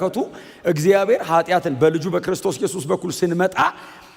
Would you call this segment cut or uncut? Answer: uncut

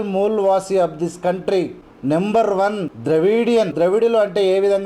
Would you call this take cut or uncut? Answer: cut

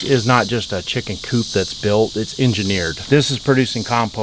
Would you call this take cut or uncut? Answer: cut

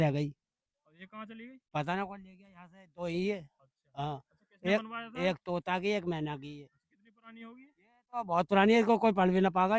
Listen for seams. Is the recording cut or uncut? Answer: uncut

